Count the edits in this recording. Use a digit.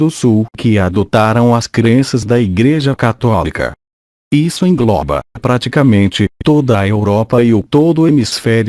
1